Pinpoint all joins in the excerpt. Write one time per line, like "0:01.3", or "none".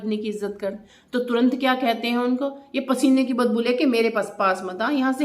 0:00.9